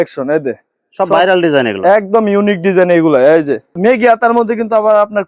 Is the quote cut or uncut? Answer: cut